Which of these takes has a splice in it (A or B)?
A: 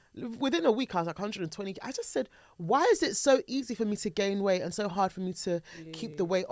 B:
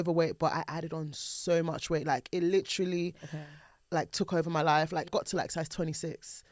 B